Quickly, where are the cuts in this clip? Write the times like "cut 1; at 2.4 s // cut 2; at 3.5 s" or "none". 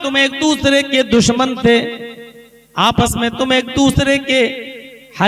none